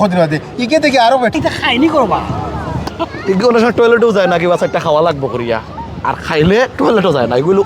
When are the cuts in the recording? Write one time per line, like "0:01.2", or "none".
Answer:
0:01.4
0:03.0